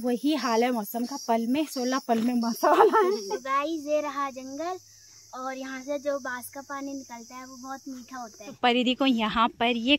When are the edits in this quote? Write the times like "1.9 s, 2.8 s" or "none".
3.3 s, 8.5 s